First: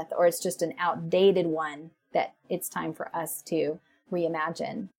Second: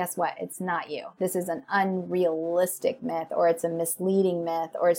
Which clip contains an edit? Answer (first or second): first